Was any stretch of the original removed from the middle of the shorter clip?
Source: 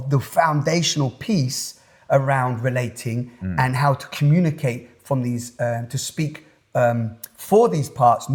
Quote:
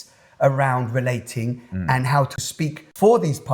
yes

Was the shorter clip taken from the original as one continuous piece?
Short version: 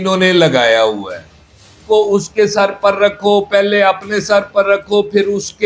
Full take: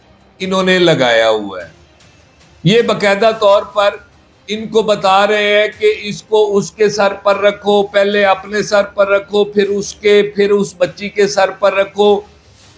no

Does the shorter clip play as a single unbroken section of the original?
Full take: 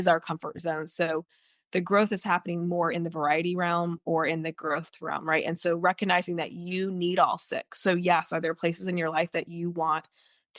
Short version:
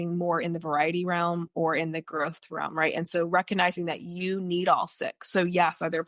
yes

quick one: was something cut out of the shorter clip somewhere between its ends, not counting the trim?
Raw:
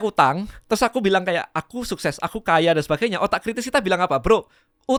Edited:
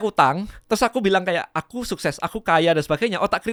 no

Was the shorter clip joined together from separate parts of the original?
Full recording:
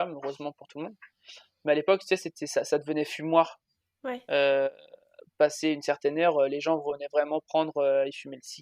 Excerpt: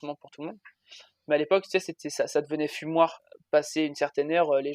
yes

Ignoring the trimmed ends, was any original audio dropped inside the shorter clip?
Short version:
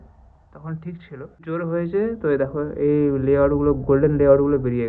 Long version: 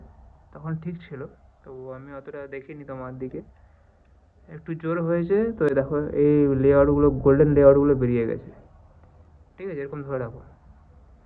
yes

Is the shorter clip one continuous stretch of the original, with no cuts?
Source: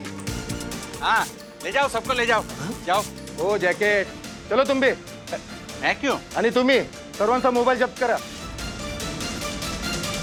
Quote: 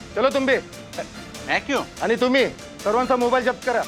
yes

